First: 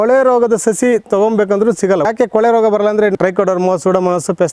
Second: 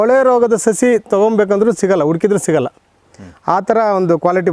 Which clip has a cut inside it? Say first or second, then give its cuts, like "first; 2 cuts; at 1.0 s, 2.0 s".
first; 2 cuts; at 2.0 s, 3.2 s